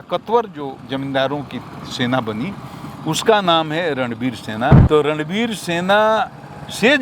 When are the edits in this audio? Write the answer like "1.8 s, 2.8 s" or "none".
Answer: 4.8 s